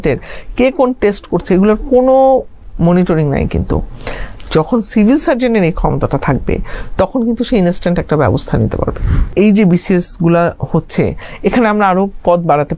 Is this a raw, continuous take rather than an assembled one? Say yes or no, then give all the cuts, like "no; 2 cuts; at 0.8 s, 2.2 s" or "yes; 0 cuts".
no; 1 cut; at 9.3 s